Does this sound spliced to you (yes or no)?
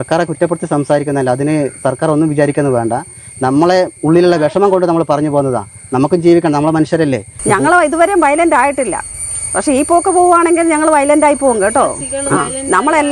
yes